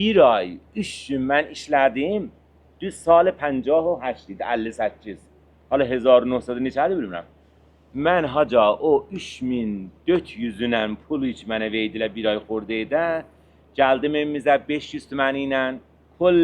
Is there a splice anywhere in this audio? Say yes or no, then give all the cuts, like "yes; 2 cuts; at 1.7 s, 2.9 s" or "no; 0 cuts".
no; 0 cuts